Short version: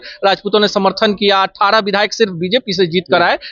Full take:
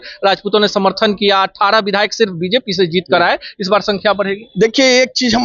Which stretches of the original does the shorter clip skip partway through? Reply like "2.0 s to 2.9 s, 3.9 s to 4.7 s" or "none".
none

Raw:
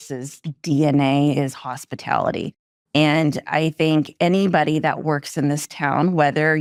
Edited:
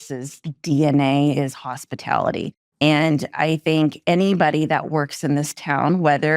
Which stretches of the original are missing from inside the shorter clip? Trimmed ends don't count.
2.6 s to 2.7 s

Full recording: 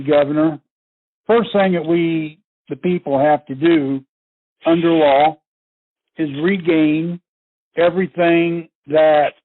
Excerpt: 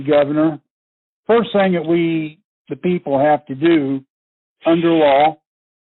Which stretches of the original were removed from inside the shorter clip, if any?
none

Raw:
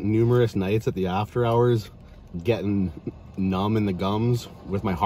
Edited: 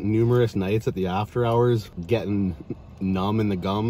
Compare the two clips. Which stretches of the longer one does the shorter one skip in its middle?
1.9 s to 2.3 s

